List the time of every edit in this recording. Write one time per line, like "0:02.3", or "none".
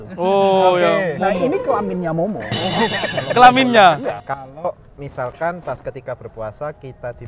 0:04.2